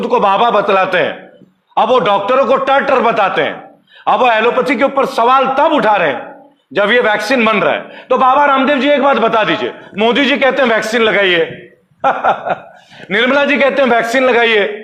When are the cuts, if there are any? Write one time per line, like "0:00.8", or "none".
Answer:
none